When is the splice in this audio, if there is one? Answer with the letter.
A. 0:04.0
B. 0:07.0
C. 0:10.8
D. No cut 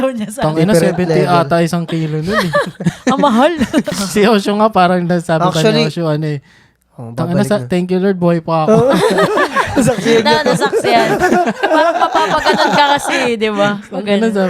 A